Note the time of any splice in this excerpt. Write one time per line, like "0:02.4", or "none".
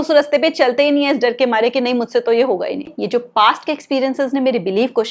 0:02.9